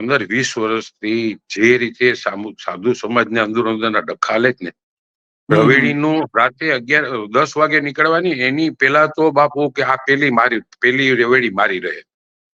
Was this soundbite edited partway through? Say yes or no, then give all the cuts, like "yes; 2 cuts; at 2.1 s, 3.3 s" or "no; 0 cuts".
no; 0 cuts